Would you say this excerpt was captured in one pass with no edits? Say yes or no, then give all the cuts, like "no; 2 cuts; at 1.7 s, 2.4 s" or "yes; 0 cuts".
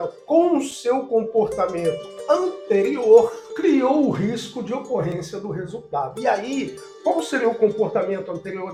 yes; 0 cuts